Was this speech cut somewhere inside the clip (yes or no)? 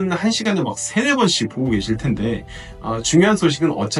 no